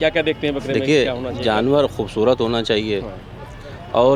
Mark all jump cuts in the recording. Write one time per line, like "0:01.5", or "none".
none